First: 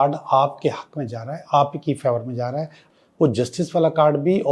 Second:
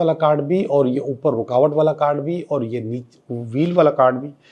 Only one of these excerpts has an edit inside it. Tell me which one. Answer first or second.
first